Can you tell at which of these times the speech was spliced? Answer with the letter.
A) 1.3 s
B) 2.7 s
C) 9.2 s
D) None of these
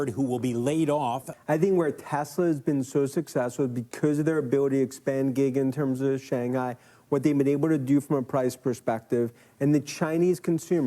A